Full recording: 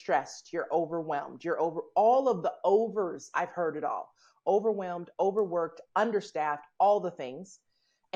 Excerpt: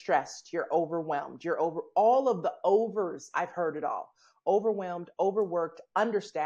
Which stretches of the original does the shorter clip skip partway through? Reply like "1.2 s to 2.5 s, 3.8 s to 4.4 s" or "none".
none